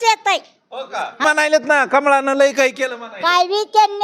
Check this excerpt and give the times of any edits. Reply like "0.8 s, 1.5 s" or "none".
1.2 s